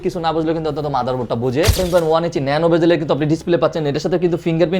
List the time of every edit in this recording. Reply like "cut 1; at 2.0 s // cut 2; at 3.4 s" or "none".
cut 1; at 1.8 s

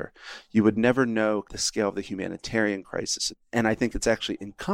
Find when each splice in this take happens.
cut 1; at 1.6 s // cut 2; at 3.4 s

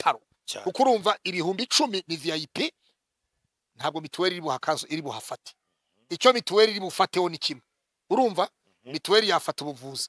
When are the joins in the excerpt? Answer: none

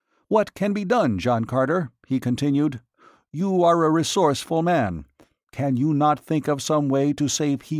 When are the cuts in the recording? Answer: none

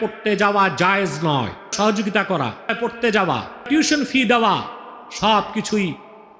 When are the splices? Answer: cut 1; at 1.7 s // cut 2; at 2.7 s // cut 3; at 3.7 s

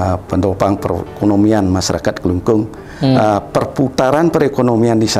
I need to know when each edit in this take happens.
none

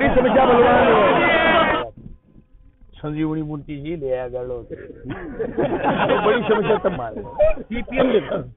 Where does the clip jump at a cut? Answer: cut 1; at 1.8 s

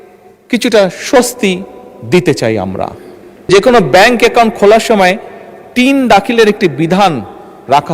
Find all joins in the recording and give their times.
cut 1; at 3.5 s

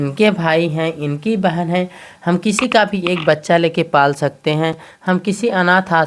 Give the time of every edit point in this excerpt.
none

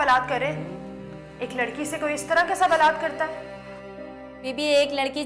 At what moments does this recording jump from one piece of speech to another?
none

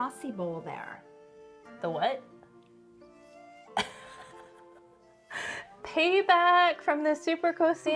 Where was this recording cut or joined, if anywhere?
none

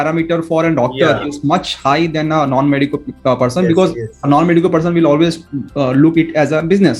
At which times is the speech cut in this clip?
none

